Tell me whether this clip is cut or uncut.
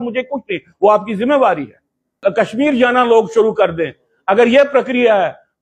cut